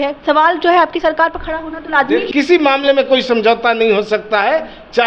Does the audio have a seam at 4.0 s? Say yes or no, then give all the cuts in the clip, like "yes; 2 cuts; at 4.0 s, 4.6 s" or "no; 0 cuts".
no; 1 cut; at 2.3 s